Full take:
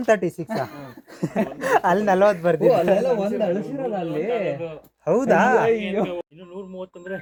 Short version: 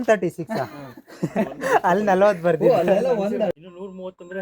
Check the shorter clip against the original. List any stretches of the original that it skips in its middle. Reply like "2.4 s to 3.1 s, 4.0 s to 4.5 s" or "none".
3.5 s to 6.3 s